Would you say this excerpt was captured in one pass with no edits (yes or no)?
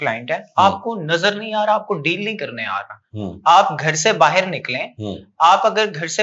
yes